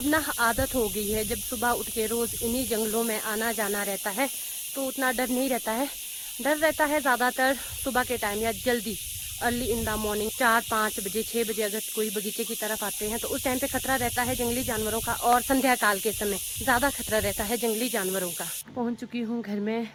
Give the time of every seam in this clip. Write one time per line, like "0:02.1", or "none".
none